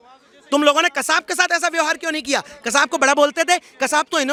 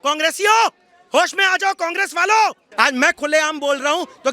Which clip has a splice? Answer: second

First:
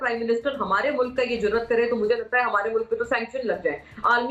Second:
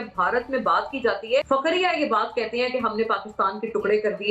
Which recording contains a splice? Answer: second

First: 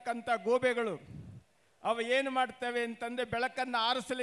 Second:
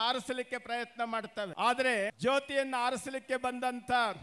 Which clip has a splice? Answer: second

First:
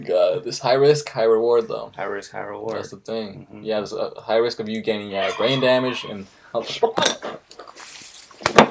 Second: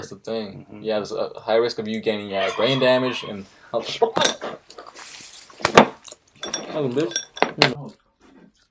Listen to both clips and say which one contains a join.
second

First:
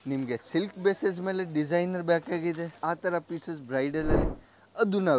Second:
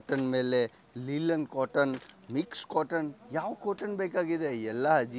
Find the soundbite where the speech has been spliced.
first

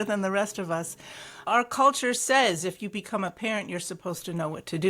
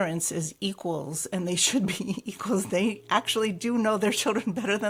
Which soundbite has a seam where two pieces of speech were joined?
first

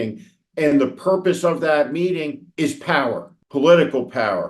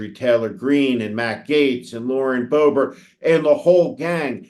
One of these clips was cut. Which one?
first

